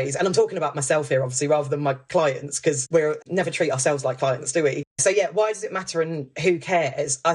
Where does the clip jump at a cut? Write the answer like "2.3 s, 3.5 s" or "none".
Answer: 4.8 s